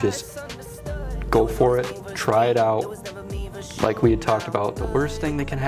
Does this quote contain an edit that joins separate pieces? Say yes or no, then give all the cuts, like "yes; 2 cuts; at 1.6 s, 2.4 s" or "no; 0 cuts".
no; 0 cuts